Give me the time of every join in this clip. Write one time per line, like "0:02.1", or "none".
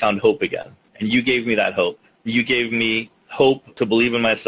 0:02.1
0:03.5